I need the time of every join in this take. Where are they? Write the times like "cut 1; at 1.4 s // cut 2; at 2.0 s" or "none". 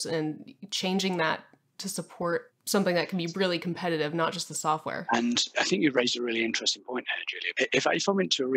cut 1; at 7.4 s